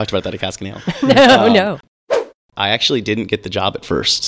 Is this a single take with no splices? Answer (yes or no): no